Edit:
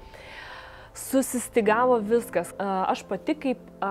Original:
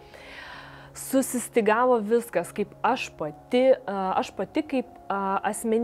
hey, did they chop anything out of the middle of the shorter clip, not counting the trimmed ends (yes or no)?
yes